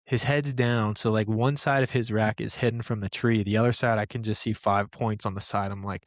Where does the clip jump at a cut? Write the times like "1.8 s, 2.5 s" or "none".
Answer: none